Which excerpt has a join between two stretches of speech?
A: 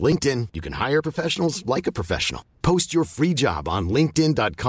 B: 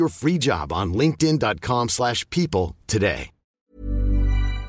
B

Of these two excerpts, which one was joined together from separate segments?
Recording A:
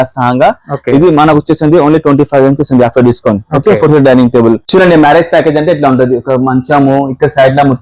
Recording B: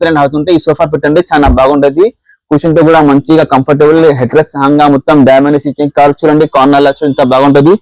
A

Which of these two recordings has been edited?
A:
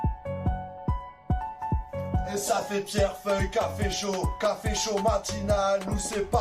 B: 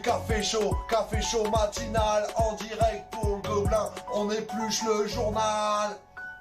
A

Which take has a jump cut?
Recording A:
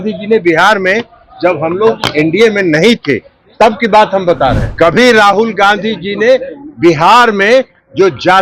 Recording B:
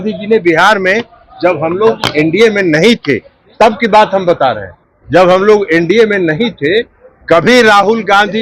A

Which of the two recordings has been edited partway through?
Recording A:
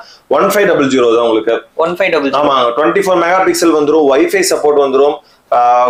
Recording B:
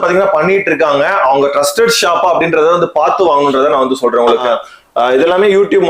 B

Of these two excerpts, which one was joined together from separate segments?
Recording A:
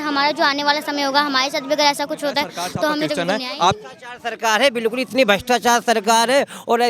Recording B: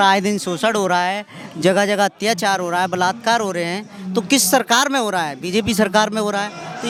A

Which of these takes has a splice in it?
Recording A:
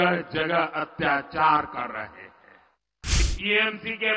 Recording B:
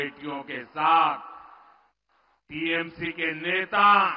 A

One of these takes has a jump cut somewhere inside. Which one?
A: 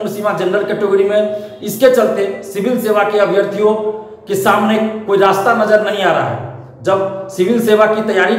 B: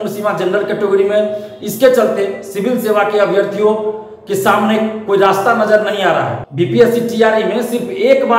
B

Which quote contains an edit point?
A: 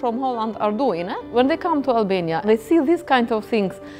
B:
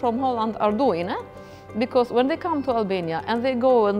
A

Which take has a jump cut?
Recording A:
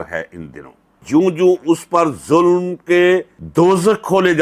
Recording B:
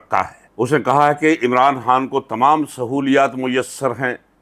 A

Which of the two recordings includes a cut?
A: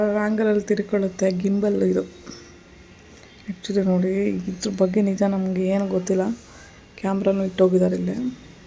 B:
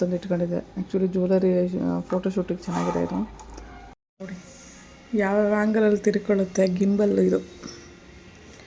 B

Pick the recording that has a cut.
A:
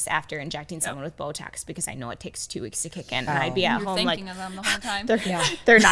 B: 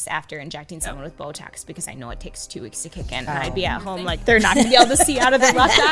B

